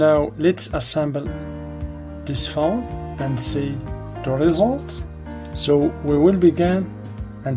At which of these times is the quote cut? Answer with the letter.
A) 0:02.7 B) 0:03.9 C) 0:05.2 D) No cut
B